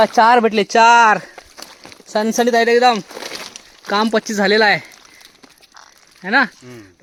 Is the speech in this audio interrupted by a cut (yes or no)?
no